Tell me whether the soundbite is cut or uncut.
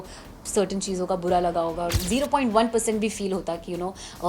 cut